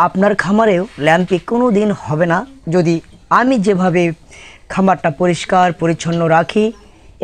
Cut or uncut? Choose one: uncut